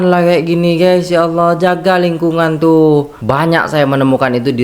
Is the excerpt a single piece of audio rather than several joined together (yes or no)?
no